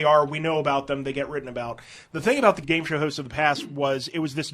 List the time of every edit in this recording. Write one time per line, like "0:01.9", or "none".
0:02.6